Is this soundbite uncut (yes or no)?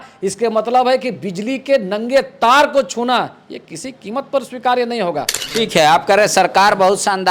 no